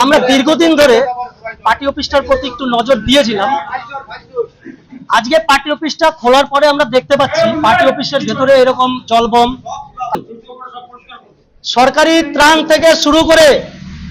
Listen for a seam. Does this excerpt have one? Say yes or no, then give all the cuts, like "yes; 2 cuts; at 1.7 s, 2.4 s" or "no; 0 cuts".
yes; 1 cut; at 10.1 s